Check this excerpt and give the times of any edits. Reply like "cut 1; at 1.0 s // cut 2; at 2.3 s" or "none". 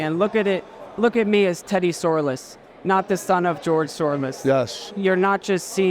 cut 1; at 4.8 s

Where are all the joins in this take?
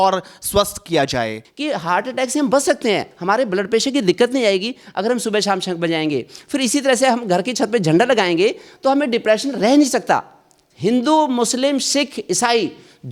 cut 1; at 1.5 s

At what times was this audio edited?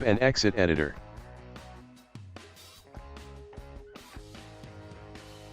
cut 1; at 0.9 s

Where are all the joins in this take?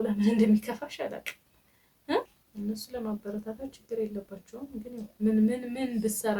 cut 1; at 2.4 s

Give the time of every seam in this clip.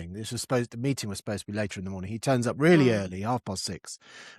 none

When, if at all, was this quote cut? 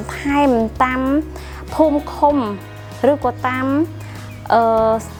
none

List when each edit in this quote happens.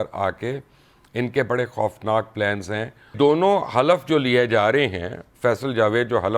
cut 1; at 3.0 s

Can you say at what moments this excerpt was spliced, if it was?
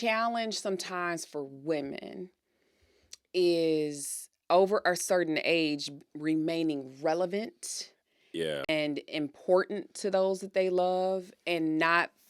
cut 1; at 8.7 s

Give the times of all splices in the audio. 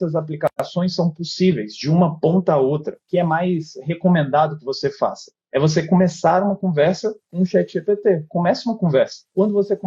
none

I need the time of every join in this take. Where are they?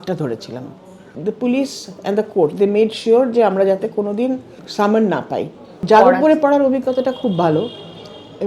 cut 1; at 1.2 s // cut 2; at 4.6 s // cut 3; at 5.7 s

